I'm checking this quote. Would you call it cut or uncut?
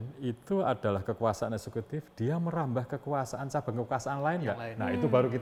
uncut